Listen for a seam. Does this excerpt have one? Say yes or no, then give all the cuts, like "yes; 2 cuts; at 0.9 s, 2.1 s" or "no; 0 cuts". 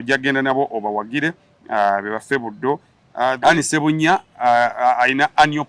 yes; 1 cut; at 3.4 s